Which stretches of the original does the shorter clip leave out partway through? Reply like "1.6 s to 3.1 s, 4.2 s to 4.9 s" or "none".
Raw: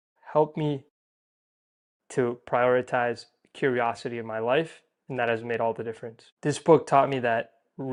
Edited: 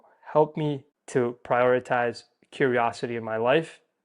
0.9 s to 2.0 s